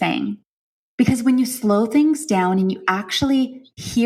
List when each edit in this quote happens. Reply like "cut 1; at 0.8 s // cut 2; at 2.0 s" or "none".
none